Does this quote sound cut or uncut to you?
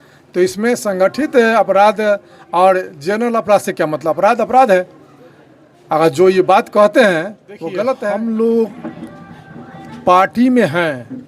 cut